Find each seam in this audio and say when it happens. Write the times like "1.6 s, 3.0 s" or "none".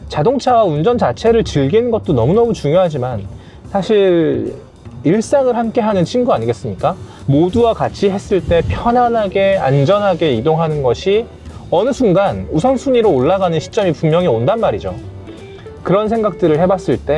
none